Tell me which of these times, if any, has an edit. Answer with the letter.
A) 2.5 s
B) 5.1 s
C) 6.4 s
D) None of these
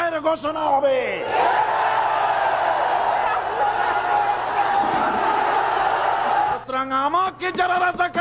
C